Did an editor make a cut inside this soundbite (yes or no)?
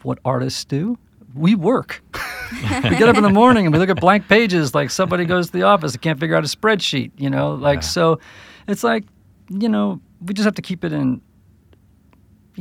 no